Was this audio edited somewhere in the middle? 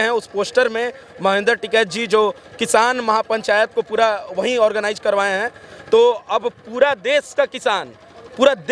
no; 0 cuts

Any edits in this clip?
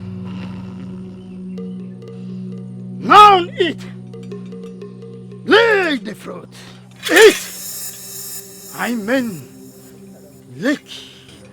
yes; 1 cut; at 3.0 s

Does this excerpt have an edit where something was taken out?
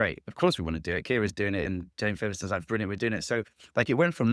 yes; 1 cut; at 1.7 s

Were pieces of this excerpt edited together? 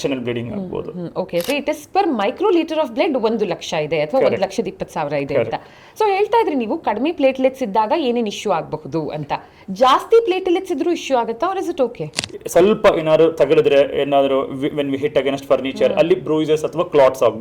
yes; 2 cuts; at 1.5 s, 12.1 s

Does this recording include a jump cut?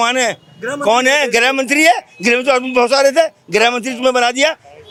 no; 0 cuts

